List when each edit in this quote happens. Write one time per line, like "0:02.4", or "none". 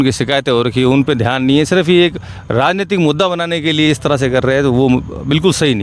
none